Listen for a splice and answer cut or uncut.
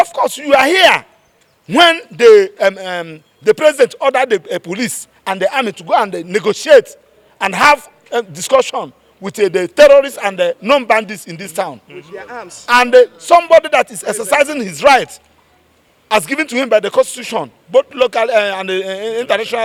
uncut